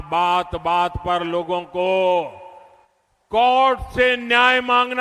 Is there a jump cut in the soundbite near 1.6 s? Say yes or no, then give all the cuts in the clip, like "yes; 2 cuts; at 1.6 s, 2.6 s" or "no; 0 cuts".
no; 1 cut; at 4.0 s